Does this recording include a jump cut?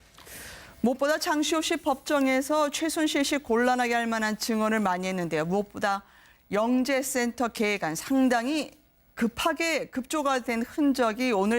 yes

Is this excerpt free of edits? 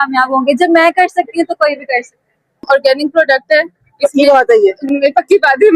no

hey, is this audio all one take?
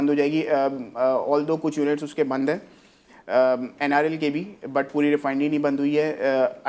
yes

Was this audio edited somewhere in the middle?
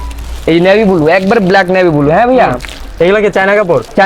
no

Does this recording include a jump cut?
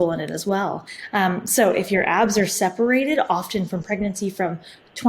yes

